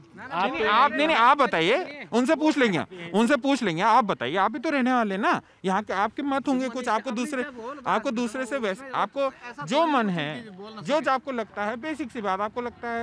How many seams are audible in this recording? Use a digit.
0